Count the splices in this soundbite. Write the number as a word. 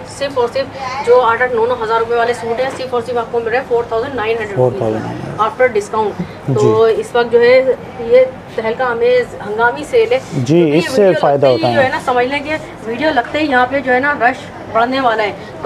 zero